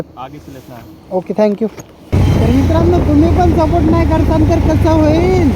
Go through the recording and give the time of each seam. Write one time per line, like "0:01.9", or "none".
0:02.1